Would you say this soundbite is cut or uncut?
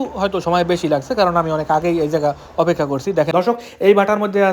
cut